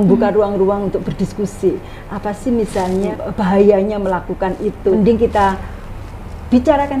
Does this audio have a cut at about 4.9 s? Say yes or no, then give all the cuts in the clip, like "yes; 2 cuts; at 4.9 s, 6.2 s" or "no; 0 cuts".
yes; 2 cuts; at 3.2 s, 4.9 s